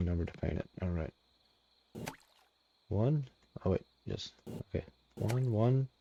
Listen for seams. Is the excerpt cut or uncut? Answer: uncut